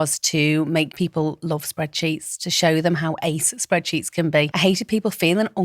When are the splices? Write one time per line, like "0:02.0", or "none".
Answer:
0:00.9
0:04.5